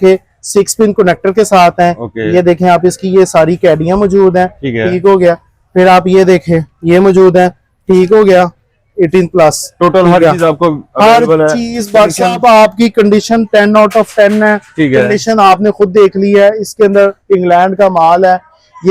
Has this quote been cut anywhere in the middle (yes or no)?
no